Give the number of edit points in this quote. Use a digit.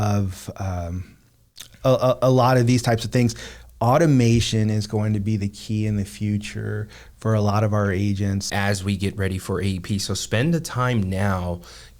1